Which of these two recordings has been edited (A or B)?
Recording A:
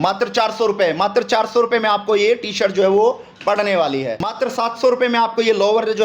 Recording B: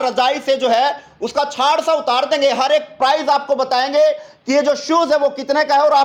A